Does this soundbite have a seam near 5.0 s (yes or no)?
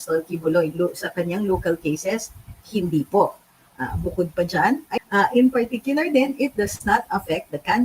yes